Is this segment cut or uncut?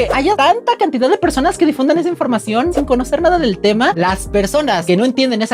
cut